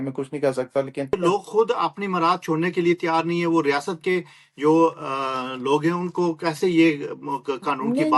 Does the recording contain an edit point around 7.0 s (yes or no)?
no